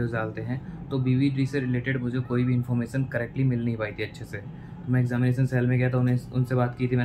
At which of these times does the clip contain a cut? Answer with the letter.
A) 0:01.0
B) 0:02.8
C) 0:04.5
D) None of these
D